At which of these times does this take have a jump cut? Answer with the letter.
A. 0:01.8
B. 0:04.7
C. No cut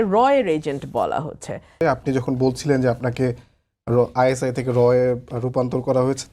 A